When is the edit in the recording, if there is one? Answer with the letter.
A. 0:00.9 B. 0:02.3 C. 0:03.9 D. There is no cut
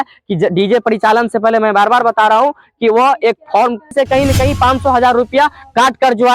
C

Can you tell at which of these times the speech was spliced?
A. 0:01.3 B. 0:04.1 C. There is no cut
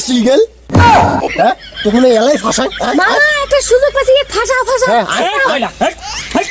A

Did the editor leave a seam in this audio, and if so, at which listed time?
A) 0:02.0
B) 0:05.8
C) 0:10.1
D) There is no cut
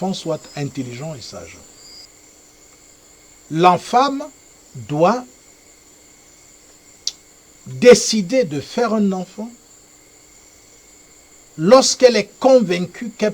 A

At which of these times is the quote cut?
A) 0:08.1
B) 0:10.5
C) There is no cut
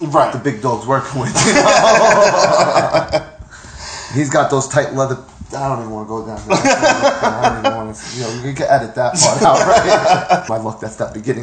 B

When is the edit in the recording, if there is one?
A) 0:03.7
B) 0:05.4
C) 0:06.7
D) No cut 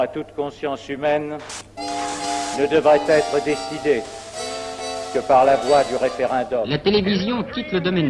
C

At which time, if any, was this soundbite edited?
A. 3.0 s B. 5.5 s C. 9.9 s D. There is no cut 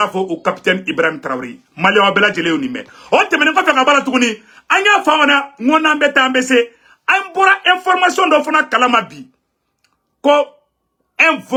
D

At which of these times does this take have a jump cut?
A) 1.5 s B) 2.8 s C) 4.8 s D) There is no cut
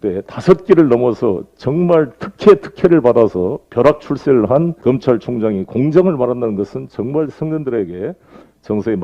C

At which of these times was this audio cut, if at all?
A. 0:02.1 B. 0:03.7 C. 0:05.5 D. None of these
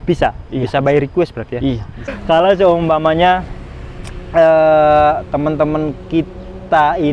A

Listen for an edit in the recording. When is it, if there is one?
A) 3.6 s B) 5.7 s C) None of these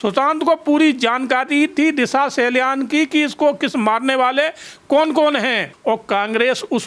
B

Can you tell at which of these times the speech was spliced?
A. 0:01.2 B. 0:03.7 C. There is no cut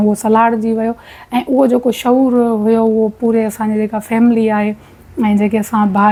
C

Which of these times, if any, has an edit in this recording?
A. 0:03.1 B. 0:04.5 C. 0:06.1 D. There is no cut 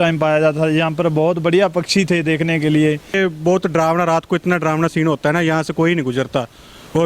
A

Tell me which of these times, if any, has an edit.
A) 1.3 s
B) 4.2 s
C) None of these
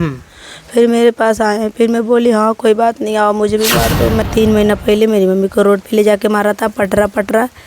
B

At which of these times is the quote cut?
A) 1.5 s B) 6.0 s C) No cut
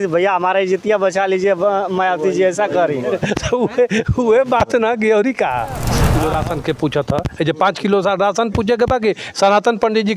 B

